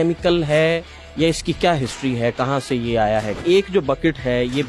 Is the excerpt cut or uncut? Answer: cut